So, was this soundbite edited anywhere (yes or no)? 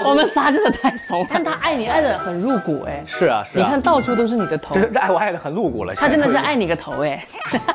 yes